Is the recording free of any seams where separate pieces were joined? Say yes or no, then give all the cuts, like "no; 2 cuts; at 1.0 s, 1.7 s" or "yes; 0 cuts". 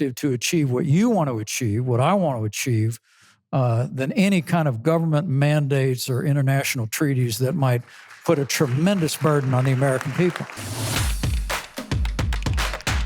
no; 1 cut; at 10.6 s